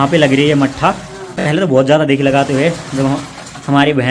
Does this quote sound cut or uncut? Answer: cut